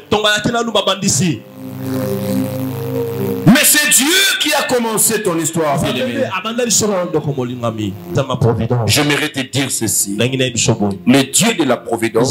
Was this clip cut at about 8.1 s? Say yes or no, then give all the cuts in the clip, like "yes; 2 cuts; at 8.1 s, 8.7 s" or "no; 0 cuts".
yes; 1 cut; at 8.1 s